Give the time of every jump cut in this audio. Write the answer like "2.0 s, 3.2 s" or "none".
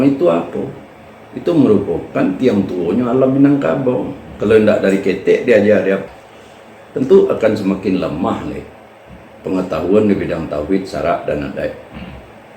6.0 s

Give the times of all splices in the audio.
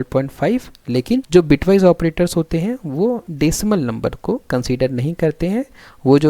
1.2 s, 3.3 s

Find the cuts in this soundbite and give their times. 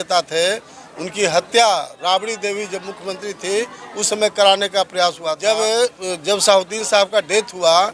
5.4 s

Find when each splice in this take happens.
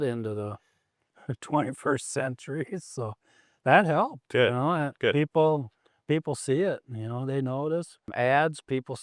8.1 s

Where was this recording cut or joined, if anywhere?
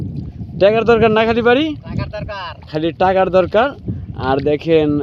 none

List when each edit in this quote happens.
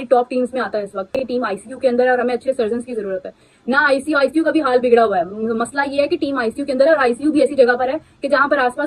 1.2 s

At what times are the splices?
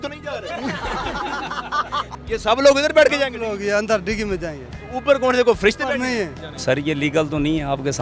2.1 s, 6.4 s

